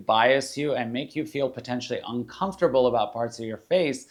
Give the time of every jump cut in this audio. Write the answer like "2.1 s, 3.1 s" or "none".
none

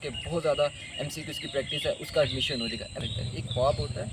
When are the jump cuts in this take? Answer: 3.0 s

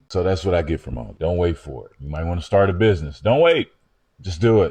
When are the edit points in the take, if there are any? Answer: 1.1 s

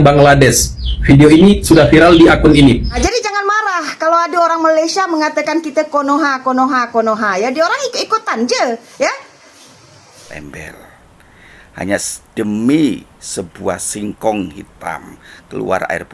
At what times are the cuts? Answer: 2.9 s, 10.3 s

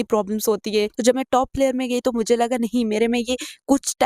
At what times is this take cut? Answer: 0.9 s

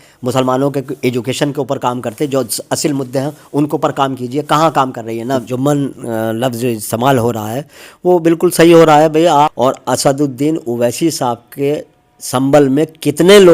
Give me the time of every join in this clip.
5.5 s, 9.3 s

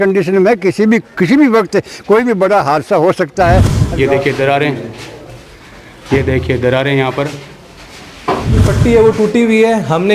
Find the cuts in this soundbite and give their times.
3.8 s, 8.7 s

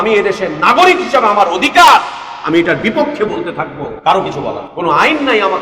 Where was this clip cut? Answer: 3.9 s, 4.7 s

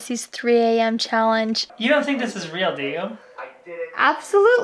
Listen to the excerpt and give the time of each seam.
1.7 s

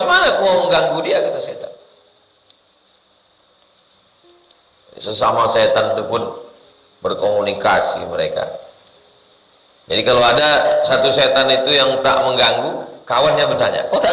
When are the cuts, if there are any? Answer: none

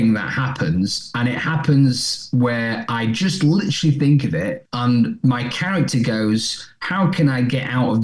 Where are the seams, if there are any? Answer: 4.6 s

